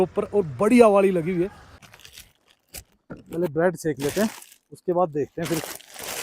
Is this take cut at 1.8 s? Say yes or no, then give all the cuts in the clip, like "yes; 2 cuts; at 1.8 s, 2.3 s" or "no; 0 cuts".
yes; 1 cut; at 1.8 s